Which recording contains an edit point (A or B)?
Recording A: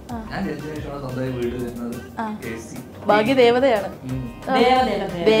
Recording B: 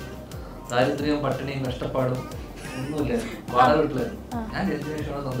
A